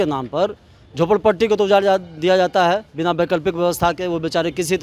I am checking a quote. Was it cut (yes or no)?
no